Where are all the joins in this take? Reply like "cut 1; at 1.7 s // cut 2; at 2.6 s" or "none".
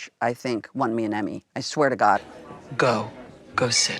cut 1; at 2.4 s